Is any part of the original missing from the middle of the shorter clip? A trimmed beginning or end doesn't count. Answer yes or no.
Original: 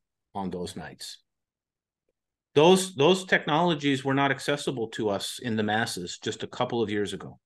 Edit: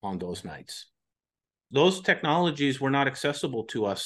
yes